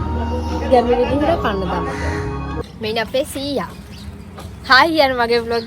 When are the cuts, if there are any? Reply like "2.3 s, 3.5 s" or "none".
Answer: 2.6 s